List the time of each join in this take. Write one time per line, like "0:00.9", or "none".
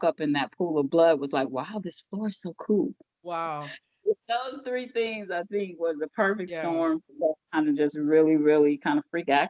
0:03.1

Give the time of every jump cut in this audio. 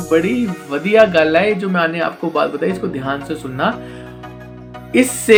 none

